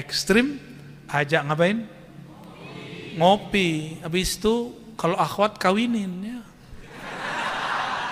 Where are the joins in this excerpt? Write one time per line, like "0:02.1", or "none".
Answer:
none